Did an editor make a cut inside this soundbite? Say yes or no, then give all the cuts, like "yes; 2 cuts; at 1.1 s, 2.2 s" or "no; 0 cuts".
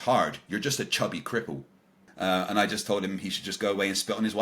yes; 1 cut; at 2.0 s